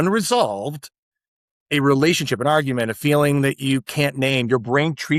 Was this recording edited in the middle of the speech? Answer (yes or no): no